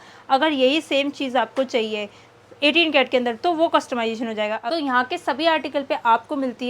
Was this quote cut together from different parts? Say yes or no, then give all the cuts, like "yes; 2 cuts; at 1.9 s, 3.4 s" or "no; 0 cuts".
yes; 1 cut; at 4.6 s